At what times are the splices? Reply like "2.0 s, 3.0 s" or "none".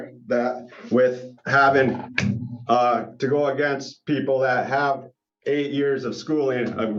none